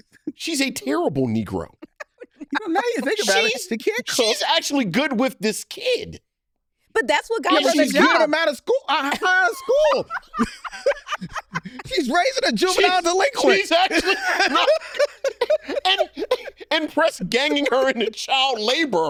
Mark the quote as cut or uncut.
uncut